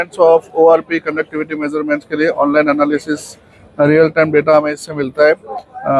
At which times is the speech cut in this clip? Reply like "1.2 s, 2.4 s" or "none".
none